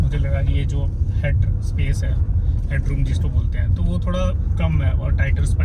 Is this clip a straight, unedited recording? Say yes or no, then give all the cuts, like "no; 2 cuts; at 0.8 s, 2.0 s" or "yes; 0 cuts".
yes; 0 cuts